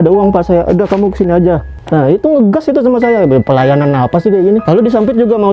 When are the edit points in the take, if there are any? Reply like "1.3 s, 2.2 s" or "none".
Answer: 1.7 s, 4.6 s